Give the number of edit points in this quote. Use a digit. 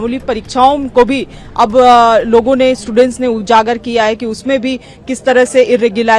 0